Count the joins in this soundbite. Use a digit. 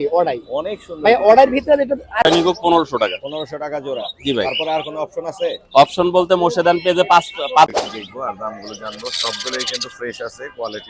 2